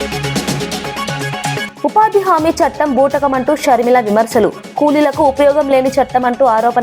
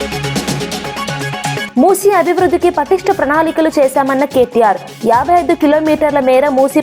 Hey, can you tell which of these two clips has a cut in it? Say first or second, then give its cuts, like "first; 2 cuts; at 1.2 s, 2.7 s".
first; 1 cut; at 1.7 s